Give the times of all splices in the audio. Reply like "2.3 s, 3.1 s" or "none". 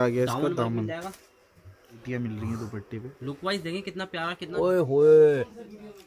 2.0 s, 4.5 s